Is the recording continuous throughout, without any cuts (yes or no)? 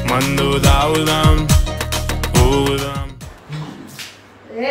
no